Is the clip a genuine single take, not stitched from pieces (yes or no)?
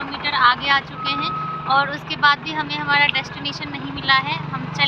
yes